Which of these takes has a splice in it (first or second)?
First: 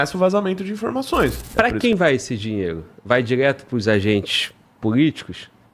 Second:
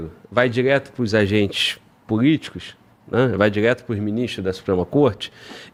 first